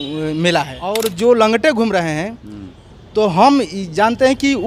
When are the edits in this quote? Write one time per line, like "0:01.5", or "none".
0:01.0